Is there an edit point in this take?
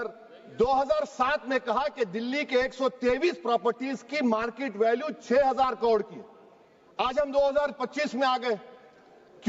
no; 0 cuts

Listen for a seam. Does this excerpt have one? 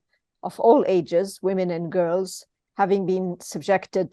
no; 0 cuts

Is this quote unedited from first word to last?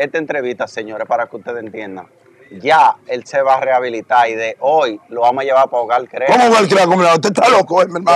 yes; 0 cuts

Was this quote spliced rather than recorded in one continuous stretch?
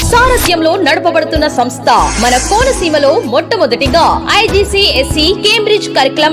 no; 0 cuts

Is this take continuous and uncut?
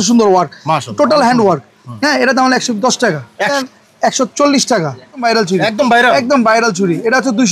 no; 2 cuts; at 3.5 s, 5.2 s

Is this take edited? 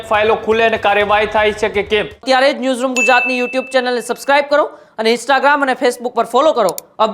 yes; 1 cut; at 2.1 s

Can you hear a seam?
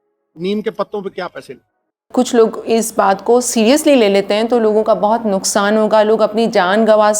yes; 1 cut; at 2.0 s

